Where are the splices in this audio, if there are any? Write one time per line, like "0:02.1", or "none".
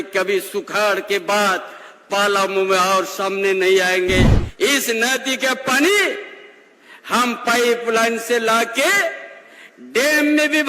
0:04.4